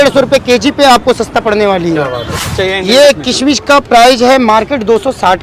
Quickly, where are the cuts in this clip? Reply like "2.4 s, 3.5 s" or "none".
2.4 s